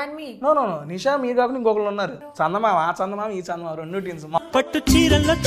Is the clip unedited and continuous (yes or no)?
no